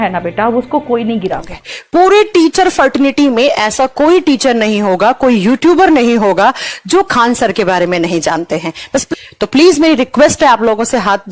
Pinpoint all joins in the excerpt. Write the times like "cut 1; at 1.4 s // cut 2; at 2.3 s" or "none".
cut 1; at 1.9 s // cut 2; at 9.1 s

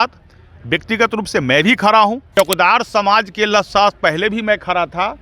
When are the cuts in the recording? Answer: cut 1; at 2.2 s

